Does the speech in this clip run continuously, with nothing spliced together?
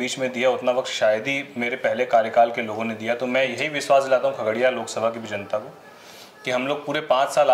yes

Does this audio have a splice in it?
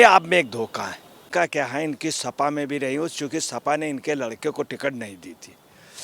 yes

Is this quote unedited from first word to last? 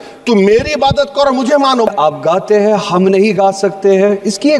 no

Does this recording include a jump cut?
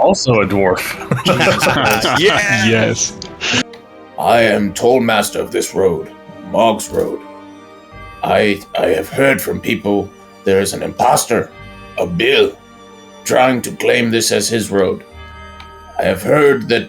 yes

